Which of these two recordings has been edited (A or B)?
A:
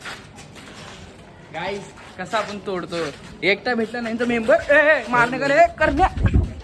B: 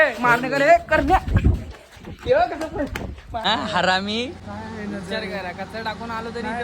B